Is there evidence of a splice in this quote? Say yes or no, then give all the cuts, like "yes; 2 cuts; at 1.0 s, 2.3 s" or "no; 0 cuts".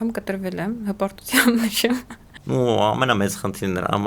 yes; 1 cut; at 2.2 s